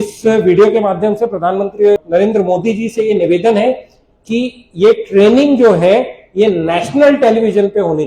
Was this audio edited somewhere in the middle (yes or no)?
yes